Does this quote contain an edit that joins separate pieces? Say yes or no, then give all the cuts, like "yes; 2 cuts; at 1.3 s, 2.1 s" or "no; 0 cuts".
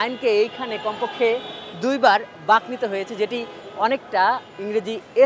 no; 0 cuts